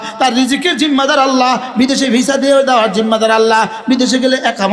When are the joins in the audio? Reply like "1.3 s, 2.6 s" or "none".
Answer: none